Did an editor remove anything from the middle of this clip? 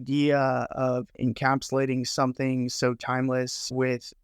yes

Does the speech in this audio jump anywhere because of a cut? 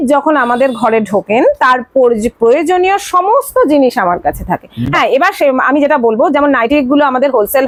no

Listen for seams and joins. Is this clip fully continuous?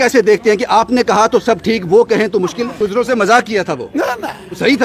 no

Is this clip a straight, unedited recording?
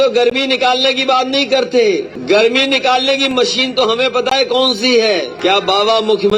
no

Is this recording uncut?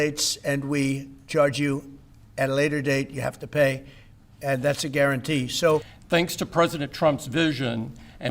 no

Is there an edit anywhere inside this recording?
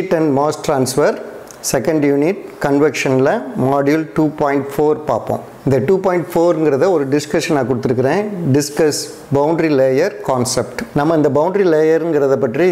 yes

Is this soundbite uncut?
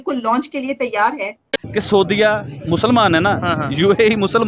no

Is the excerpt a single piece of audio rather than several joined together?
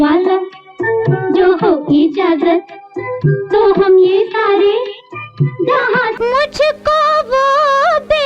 no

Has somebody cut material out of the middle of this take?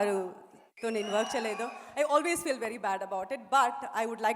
no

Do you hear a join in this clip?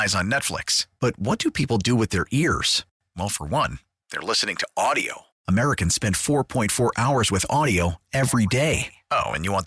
no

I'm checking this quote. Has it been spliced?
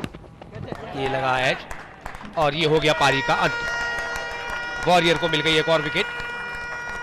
no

